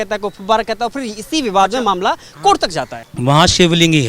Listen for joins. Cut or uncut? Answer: cut